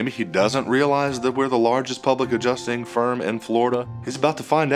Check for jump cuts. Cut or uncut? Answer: cut